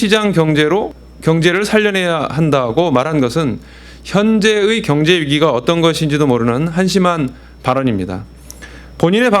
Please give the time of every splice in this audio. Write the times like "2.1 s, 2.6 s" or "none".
0.9 s